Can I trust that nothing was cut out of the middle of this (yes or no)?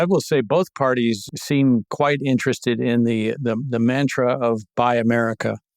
no